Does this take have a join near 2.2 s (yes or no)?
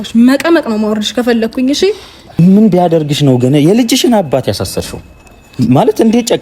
yes